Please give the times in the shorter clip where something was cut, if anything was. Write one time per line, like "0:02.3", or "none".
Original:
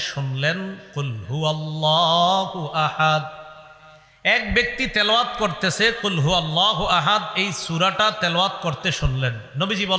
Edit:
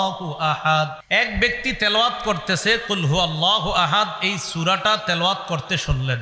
0:01.0